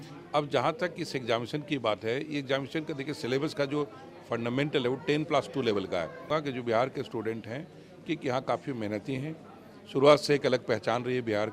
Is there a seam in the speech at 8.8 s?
no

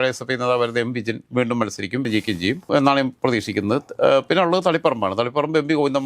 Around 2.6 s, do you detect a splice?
no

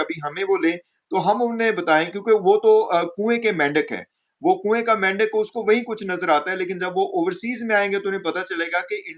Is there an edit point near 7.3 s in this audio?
no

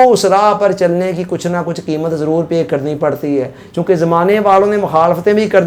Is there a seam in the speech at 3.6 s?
no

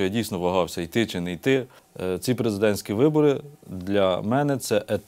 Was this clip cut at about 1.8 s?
yes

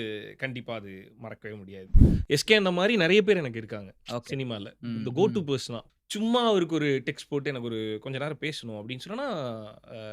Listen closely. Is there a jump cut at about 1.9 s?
yes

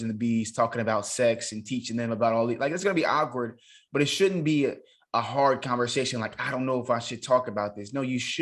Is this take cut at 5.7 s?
no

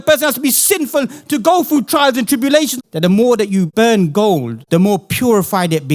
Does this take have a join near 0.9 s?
no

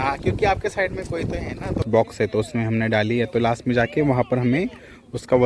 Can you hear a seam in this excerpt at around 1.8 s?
yes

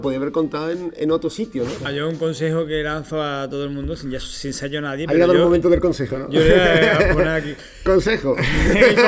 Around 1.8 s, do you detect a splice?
yes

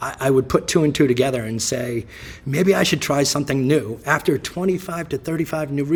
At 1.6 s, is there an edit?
no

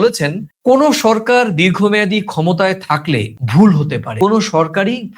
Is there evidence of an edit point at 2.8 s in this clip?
no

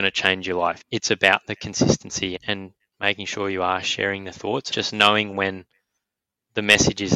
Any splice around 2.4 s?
yes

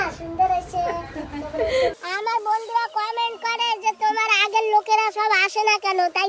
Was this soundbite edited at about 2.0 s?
yes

